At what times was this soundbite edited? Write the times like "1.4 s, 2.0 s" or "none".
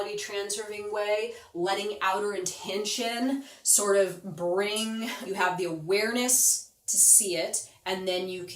5.2 s